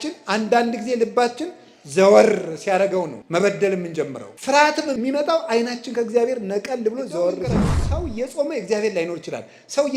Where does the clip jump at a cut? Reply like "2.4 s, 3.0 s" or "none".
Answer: 3.2 s, 4.3 s, 5.0 s, 7.8 s

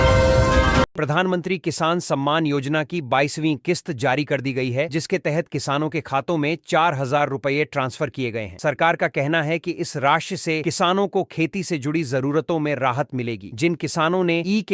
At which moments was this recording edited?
0.9 s

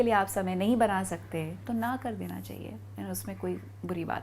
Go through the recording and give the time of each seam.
none

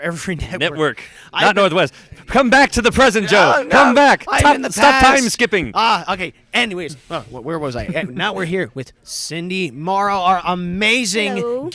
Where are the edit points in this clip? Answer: 4.4 s

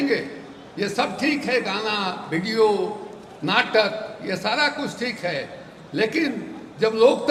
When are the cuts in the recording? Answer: none

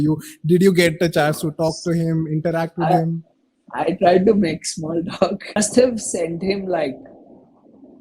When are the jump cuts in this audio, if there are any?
5.5 s

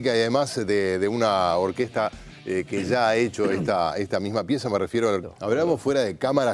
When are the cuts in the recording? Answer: none

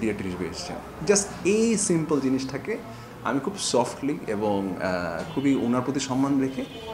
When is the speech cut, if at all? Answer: none

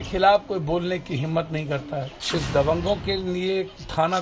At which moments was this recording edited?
2.2 s

